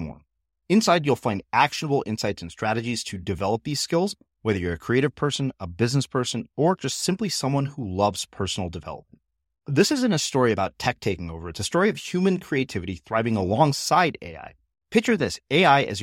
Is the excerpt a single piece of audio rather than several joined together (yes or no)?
yes